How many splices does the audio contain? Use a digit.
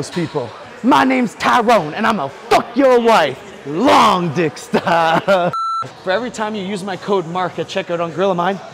1